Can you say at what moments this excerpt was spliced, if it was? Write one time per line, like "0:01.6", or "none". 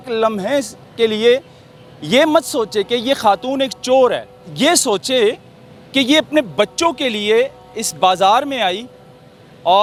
none